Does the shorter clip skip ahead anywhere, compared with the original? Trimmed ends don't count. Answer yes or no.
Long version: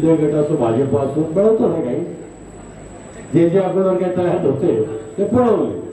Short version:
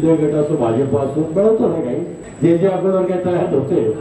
yes